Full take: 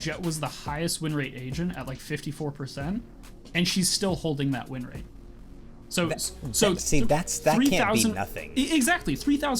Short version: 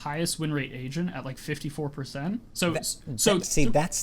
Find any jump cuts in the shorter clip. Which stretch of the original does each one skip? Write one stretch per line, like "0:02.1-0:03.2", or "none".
0:03.1-0:05.8